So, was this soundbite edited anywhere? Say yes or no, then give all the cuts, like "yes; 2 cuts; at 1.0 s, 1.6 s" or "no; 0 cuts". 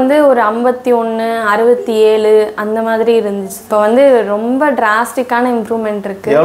yes; 1 cut; at 3.6 s